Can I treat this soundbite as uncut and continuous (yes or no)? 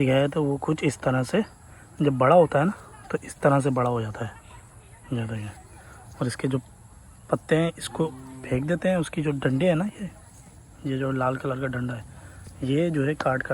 yes